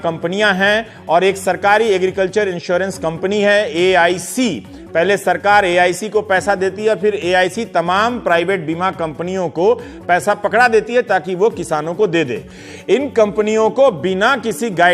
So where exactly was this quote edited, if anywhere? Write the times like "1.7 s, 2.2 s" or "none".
7.8 s